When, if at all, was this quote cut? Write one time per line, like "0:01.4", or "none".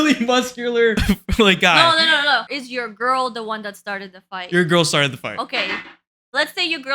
0:01.0
0:02.6